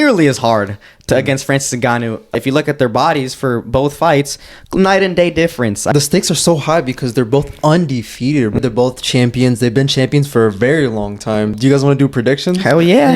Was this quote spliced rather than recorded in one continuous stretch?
yes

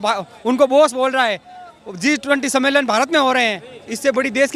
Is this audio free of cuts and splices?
yes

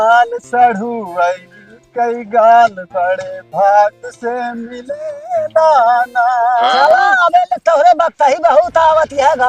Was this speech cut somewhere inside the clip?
no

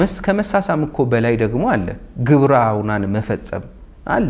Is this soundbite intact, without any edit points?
yes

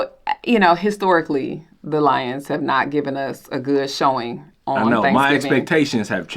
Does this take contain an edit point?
no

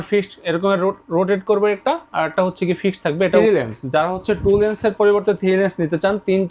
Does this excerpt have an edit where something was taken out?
yes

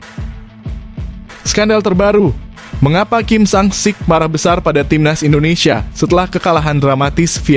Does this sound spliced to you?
yes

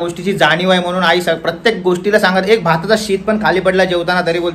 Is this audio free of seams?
yes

